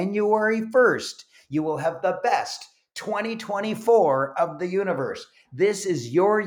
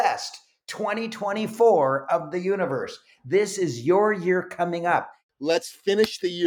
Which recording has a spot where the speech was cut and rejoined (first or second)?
second